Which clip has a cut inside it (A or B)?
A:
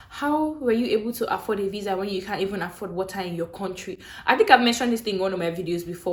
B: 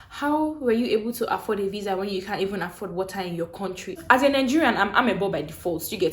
B